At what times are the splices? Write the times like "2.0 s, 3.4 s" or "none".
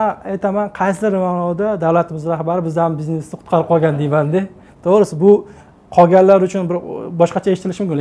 none